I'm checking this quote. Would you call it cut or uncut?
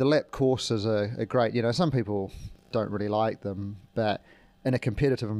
uncut